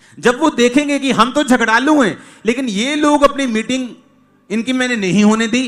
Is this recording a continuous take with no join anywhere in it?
yes; 0 cuts

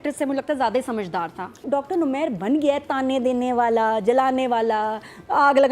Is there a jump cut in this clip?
yes; 1 cut; at 1.6 s

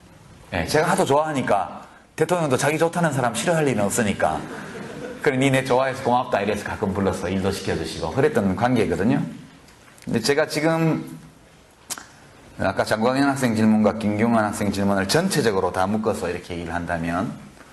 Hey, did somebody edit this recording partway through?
yes; 1 cut; at 14.9 s

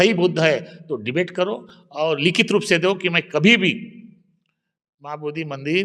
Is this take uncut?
yes; 0 cuts

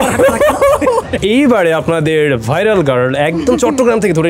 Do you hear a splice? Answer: yes; 1 cut; at 1.1 s

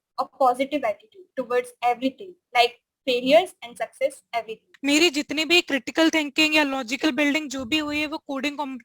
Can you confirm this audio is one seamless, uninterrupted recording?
no; 1 cut; at 4.6 s

